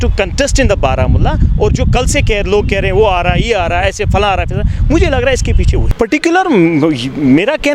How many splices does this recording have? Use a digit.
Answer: 1